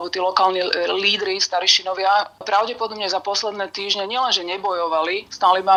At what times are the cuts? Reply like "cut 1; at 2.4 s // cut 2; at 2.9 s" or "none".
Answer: none